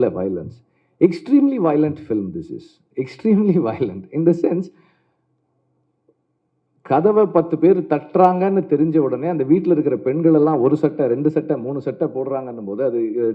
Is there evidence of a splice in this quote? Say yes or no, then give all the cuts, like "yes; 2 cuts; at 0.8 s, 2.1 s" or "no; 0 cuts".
no; 0 cuts